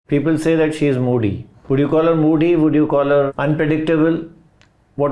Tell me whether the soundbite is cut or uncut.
cut